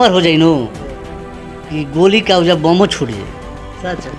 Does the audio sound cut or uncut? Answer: uncut